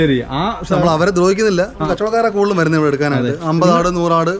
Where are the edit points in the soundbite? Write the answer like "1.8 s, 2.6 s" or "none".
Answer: 1.8 s